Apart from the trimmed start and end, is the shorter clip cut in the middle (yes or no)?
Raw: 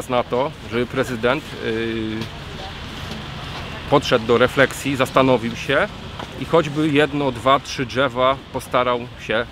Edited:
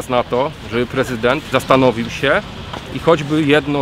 yes